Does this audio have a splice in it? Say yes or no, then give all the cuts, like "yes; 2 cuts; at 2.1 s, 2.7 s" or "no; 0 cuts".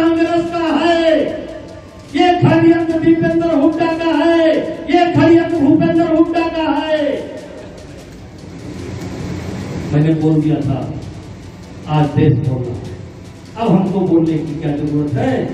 no; 0 cuts